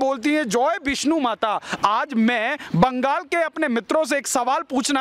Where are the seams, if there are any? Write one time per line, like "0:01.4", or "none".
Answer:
none